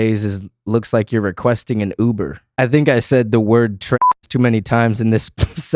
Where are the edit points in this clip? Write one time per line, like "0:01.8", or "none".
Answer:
0:02.4